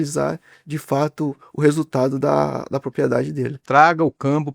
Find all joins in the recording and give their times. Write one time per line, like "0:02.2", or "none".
0:03.6